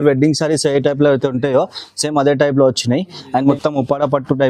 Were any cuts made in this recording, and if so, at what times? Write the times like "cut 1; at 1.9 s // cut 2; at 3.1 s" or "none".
cut 1; at 3.5 s